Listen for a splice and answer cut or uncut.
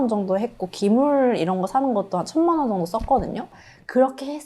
cut